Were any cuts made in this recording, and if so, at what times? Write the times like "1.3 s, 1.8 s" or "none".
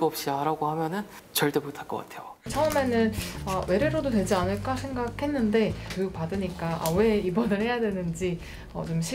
1.2 s, 2.5 s